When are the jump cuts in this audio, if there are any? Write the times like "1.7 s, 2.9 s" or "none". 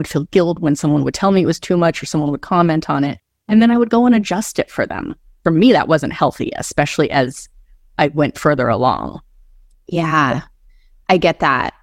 5.3 s